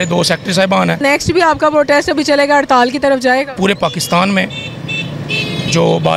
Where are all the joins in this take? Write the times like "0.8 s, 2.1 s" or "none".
1.0 s, 3.5 s